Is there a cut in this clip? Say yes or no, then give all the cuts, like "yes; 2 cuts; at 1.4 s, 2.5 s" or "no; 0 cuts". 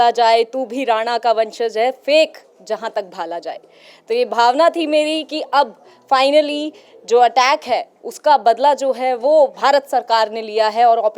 no; 0 cuts